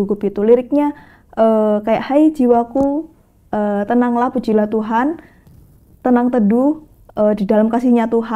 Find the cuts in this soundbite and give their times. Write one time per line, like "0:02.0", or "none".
none